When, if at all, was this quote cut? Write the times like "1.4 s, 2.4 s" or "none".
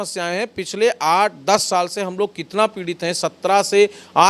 none